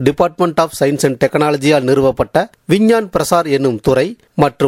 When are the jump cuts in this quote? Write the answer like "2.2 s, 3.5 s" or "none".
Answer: none